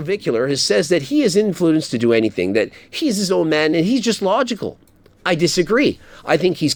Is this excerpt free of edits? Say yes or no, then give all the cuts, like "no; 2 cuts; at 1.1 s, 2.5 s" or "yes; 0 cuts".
yes; 0 cuts